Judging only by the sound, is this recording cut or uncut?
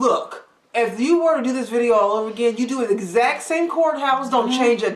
uncut